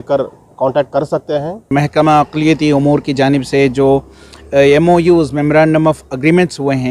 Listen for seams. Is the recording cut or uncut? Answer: cut